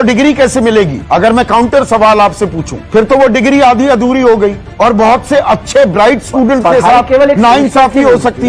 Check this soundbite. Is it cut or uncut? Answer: cut